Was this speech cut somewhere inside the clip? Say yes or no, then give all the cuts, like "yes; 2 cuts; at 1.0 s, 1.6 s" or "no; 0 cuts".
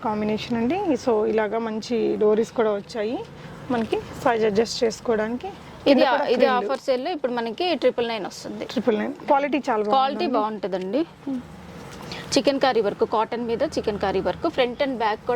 no; 0 cuts